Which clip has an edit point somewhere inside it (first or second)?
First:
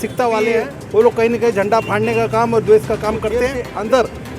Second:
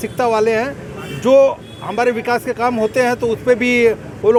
first